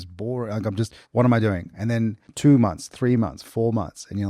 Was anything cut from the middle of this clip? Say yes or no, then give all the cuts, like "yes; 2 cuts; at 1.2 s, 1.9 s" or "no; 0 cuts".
yes; 2 cuts; at 1.0 s, 2.2 s